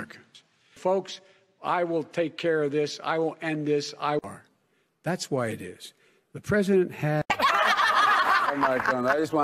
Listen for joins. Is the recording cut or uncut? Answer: cut